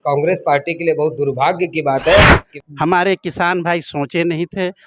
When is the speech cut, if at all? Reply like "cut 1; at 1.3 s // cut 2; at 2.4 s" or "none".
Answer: cut 1; at 2.4 s